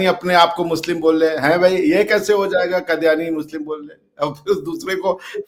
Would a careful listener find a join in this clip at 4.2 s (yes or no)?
no